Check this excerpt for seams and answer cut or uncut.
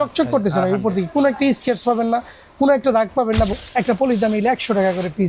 cut